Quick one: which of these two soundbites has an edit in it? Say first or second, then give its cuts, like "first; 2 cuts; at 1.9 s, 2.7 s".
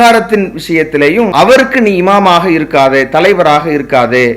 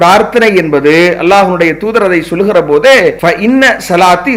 first; 1 cut; at 1.3 s